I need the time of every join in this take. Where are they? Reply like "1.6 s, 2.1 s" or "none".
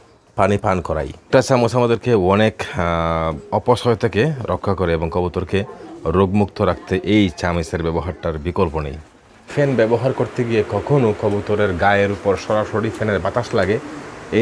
1.3 s, 9.5 s